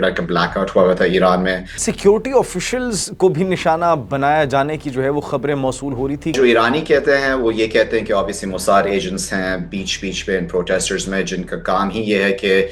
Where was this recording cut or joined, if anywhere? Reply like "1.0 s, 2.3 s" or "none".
1.8 s, 6.3 s